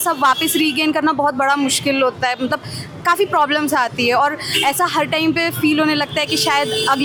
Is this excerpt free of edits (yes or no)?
yes